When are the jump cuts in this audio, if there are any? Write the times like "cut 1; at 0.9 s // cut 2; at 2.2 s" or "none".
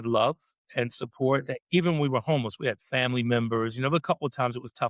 none